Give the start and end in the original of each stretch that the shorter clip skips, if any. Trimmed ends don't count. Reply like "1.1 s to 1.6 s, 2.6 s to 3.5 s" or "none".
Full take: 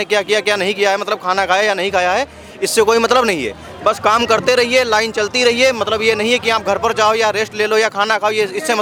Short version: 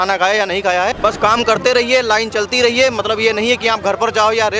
2.2 s to 3.8 s